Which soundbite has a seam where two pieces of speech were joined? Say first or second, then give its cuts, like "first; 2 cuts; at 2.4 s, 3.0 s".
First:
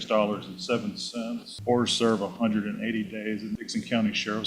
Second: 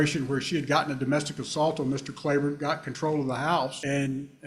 first; 1 cut; at 1.5 s